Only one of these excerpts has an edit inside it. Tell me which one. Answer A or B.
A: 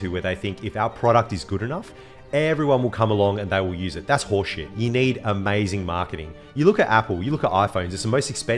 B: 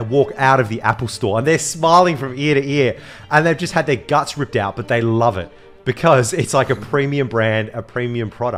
A